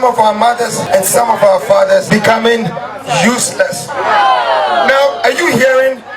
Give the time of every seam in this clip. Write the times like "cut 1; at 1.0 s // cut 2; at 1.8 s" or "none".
cut 1; at 0.8 s // cut 2; at 2.1 s